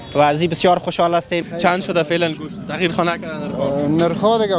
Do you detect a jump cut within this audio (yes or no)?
yes